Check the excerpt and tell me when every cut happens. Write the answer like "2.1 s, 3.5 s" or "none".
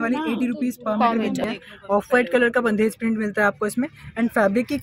1.4 s